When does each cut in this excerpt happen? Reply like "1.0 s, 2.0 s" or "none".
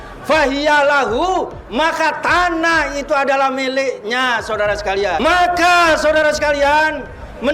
5.2 s